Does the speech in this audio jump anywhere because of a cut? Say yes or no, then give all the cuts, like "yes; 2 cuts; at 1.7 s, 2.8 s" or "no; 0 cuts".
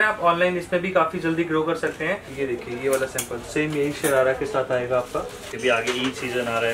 yes; 2 cuts; at 2.3 s, 5.4 s